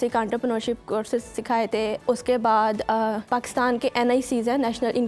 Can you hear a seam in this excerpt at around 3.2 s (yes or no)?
yes